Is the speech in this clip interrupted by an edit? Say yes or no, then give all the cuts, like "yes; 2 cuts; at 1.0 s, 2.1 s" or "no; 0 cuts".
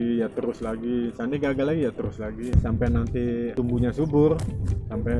yes; 1 cut; at 2.5 s